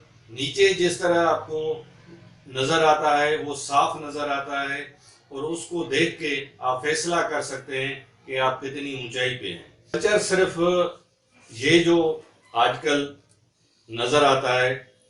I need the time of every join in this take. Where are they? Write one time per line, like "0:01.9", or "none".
0:09.9